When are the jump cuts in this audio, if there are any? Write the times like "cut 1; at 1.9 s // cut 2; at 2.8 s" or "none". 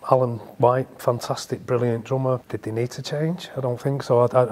cut 1; at 2.4 s